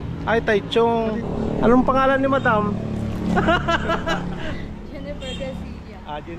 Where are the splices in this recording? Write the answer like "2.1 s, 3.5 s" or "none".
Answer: 1.3 s

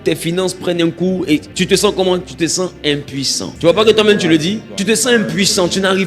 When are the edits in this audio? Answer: 1.5 s, 3.4 s, 4.7 s

